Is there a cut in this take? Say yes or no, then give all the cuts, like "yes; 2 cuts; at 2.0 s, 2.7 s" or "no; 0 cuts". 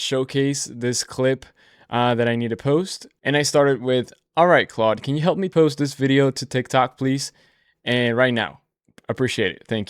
yes; 1 cut; at 5.5 s